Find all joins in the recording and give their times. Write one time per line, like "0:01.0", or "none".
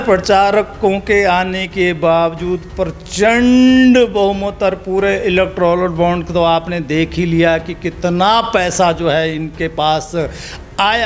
none

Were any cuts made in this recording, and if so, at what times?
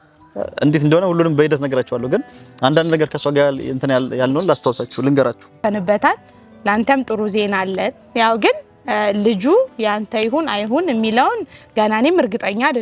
0:05.6

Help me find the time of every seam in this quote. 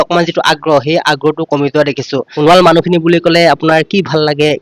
0:02.3

